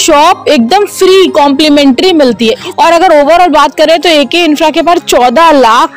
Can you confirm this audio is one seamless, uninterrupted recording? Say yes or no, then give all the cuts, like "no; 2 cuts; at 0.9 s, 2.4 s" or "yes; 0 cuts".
no; 1 cut; at 2.6 s